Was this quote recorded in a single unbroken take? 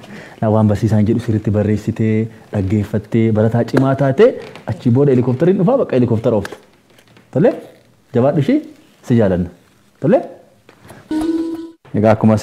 no; 1 cut; at 11.1 s

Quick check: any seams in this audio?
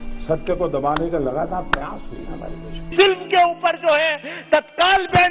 yes; 1 cut; at 2.9 s

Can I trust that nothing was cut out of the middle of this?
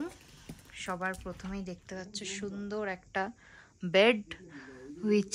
yes; 0 cuts

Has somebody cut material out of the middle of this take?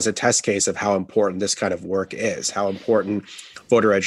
no; 0 cuts

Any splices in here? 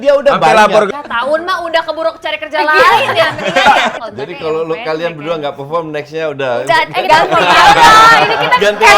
yes; 2 cuts; at 0.9 s, 4.0 s

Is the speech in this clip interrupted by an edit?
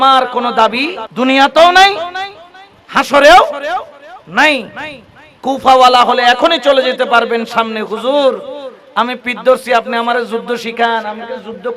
yes; 1 cut; at 1.0 s

